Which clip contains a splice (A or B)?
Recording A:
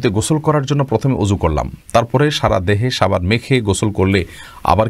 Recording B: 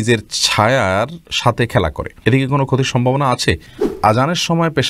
B